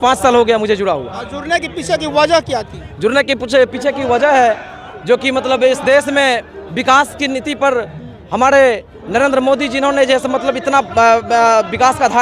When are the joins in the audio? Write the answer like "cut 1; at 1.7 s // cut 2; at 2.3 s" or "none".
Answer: none

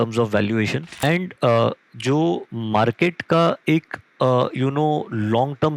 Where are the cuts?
cut 1; at 1.0 s

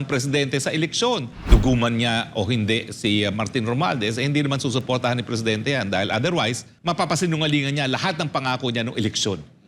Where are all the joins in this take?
cut 1; at 1.4 s // cut 2; at 6.7 s

